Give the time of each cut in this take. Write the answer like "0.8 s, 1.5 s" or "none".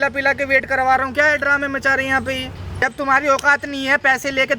2.9 s